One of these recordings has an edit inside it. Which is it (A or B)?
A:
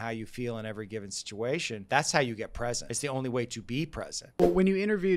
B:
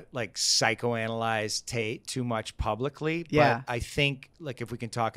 A